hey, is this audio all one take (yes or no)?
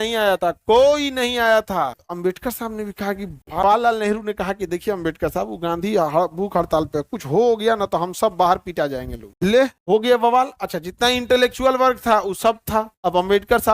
no